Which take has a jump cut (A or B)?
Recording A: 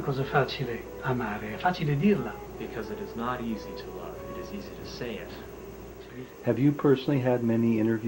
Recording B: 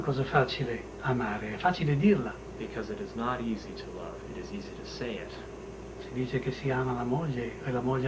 A